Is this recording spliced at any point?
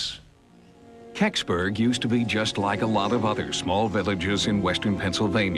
no; 0 cuts

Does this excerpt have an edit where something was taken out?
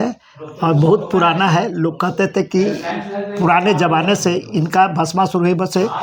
no; 0 cuts

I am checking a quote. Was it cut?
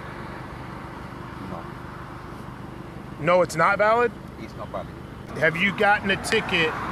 yes; 1 cut; at 5.3 s

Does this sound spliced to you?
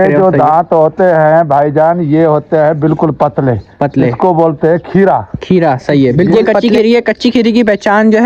yes; 1 cut; at 6.3 s

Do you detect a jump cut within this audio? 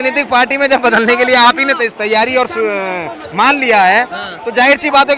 no; 0 cuts

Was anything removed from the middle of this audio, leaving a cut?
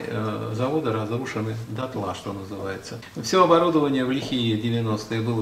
yes; 1 cut; at 3.0 s

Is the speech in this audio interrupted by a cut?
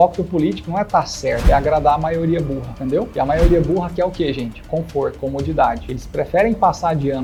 no; 0 cuts

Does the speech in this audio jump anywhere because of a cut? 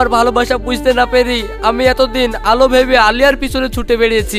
no; 0 cuts

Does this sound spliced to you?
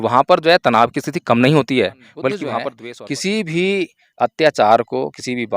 yes; 1 cut; at 2.5 s

